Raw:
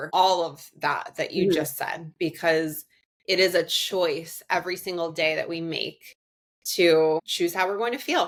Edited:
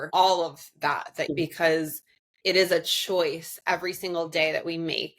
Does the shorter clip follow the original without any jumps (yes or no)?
no